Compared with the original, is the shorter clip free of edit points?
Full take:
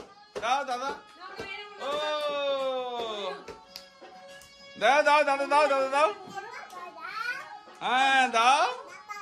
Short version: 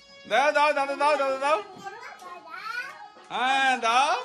yes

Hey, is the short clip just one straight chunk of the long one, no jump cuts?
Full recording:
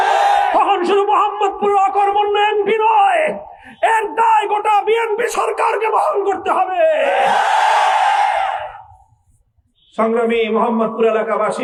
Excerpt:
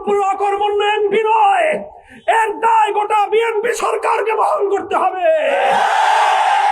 yes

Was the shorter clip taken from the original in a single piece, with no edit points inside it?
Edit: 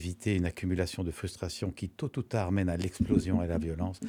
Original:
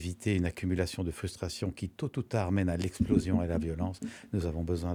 yes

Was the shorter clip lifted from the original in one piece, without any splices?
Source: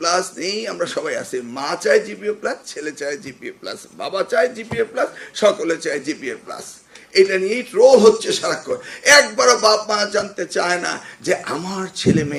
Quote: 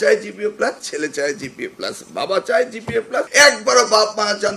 no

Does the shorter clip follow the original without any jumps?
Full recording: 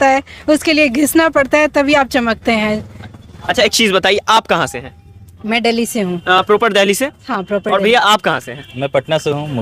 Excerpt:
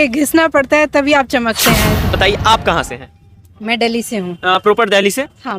no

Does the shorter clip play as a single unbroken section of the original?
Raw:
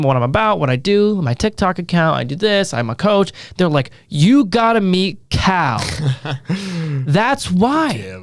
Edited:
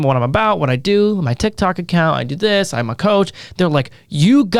yes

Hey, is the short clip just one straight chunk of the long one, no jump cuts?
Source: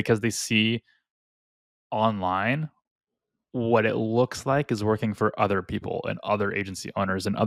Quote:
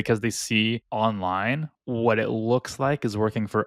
no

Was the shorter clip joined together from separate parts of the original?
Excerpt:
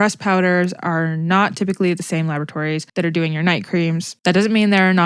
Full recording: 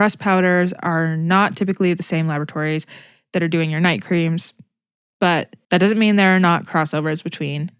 yes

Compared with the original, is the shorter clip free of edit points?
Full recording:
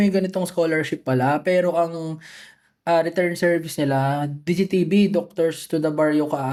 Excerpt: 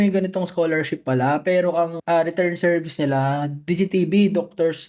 no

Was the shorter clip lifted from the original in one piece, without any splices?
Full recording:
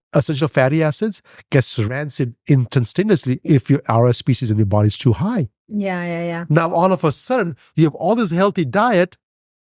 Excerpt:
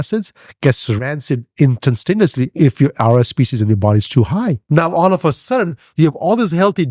no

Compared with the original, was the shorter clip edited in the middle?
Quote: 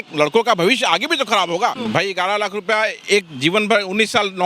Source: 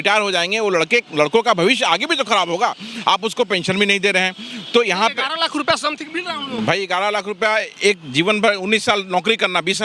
yes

